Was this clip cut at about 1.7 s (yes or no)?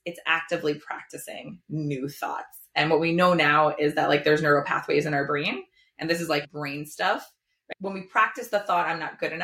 no